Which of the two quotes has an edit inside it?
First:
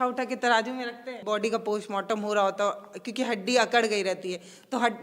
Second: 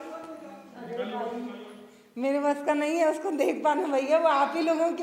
first; 1 cut; at 1.2 s

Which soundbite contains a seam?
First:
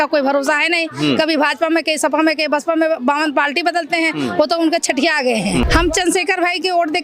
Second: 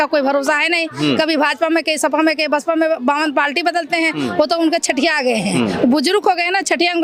first; 1 cut; at 5.7 s

